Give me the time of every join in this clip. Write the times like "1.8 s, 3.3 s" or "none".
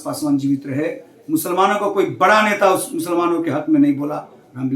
none